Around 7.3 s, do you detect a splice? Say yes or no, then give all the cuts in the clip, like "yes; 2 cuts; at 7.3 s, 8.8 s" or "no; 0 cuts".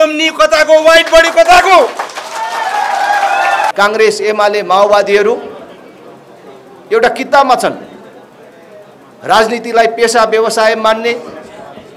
no; 1 cut; at 3.7 s